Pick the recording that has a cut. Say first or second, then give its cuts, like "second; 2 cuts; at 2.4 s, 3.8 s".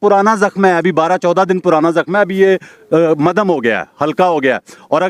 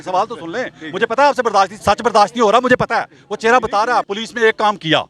second; 1 cut; at 4.1 s